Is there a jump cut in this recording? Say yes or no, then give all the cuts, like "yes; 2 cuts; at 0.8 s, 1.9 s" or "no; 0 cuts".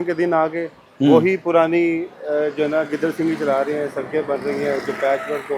no; 0 cuts